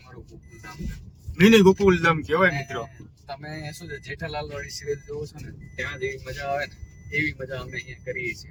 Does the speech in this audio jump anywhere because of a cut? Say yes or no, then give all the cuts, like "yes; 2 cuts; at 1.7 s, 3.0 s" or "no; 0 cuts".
no; 0 cuts